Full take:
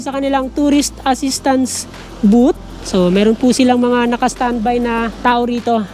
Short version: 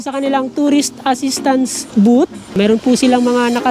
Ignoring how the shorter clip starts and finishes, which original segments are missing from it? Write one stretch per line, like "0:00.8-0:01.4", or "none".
0:01.8-0:02.1
0:02.8-0:03.1